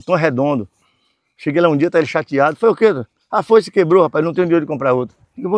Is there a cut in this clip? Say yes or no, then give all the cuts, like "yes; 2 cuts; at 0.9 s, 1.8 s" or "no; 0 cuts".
no; 0 cuts